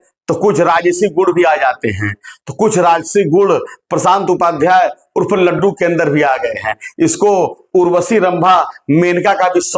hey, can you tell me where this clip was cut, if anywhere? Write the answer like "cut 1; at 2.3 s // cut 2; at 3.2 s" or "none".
none